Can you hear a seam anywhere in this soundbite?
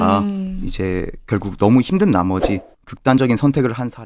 no; 0 cuts

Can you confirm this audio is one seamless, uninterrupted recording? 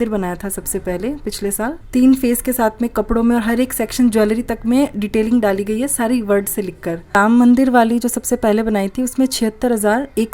no; 2 cuts; at 1.8 s, 7.2 s

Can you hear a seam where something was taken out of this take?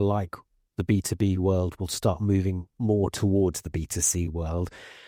no; 0 cuts

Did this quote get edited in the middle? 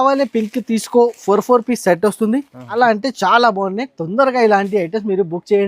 yes; 1 cut; at 2.7 s

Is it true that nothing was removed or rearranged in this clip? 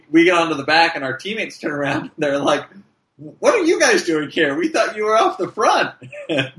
yes; 0 cuts

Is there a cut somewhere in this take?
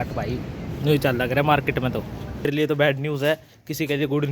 yes; 1 cut; at 2.5 s

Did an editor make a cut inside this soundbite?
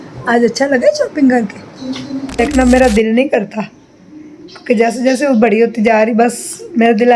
yes; 1 cut; at 2.4 s

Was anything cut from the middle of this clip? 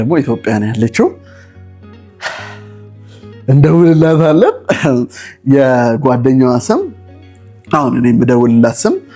no; 0 cuts

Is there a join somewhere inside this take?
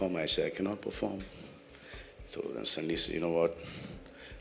no; 0 cuts

